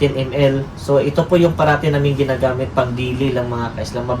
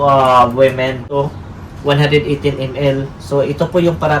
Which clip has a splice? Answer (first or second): second